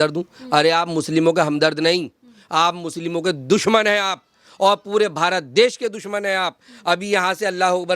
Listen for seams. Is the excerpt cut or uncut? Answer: uncut